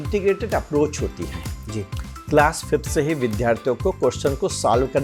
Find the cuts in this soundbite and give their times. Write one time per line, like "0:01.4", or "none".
none